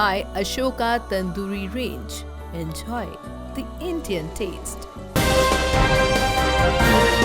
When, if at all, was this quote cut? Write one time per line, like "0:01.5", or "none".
none